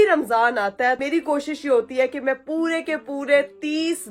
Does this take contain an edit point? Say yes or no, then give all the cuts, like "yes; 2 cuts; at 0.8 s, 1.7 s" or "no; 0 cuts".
yes; 1 cut; at 1.0 s